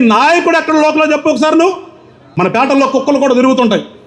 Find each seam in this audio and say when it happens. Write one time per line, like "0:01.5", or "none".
0:02.7